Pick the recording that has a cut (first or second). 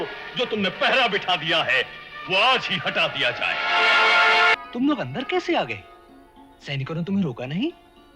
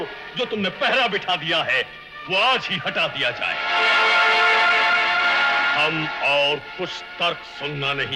first